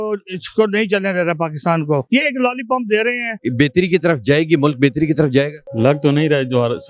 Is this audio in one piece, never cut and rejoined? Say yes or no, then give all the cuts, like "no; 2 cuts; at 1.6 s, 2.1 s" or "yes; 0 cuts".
no; 3 cuts; at 2.0 s, 3.3 s, 5.6 s